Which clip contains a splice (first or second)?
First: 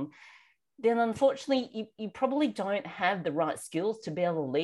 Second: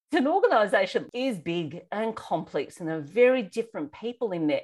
second